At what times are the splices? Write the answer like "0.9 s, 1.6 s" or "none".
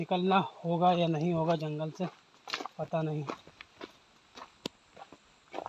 none